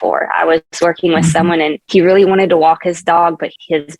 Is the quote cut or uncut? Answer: cut